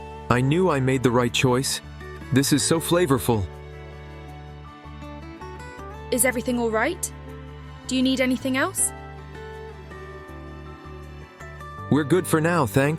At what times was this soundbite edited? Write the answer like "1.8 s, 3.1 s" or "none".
3.4 s, 6.1 s